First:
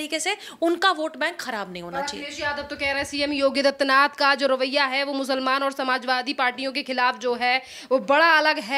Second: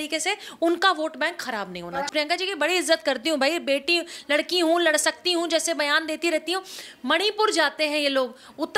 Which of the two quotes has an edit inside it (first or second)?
second